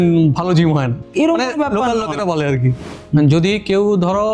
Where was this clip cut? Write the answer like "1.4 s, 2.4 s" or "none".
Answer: 1.0 s, 2.7 s